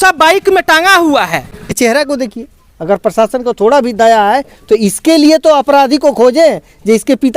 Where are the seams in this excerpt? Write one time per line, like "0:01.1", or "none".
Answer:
0:01.7

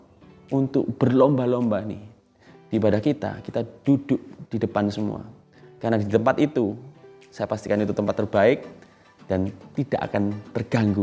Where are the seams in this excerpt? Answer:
none

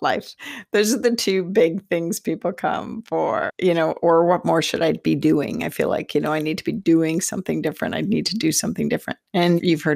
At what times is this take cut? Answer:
none

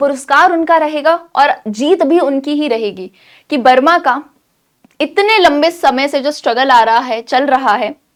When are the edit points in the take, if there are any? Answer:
none

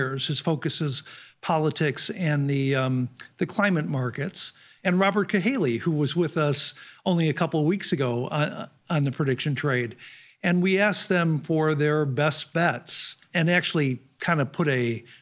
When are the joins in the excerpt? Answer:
0:04.6
0:13.2

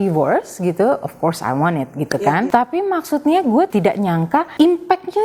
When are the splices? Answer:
0:02.5
0:03.9

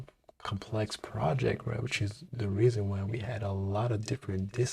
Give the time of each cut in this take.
none

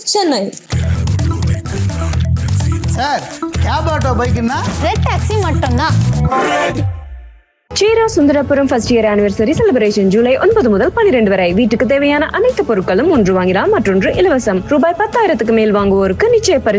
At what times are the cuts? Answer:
none

